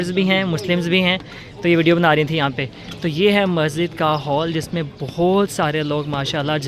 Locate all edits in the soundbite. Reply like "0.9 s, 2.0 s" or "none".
none